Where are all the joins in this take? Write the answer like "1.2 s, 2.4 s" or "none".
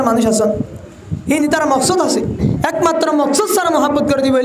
2.6 s